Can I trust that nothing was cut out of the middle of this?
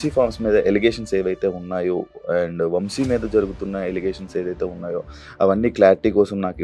yes; 0 cuts

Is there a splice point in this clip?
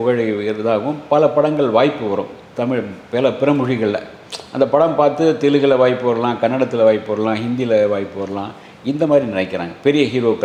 no; 0 cuts

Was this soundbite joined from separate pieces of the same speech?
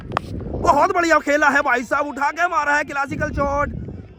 no; 0 cuts

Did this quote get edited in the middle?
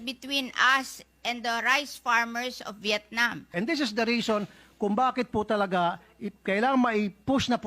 yes; 1 cut; at 3.5 s

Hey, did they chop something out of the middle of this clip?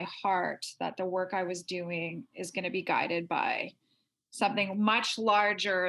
no; 0 cuts

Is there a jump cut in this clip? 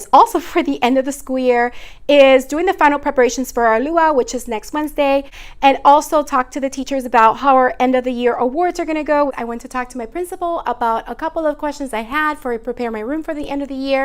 yes; 2 cuts; at 5.3 s, 9.4 s

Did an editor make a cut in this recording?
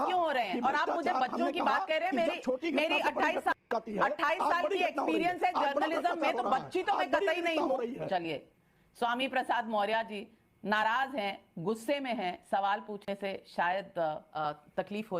yes; 2 cuts; at 8.0 s, 14.3 s

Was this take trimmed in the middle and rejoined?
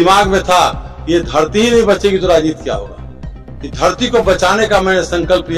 no; 0 cuts

